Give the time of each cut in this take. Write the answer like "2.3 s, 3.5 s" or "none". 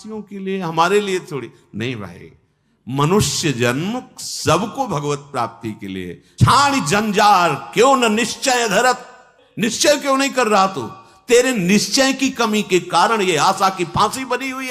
6.2 s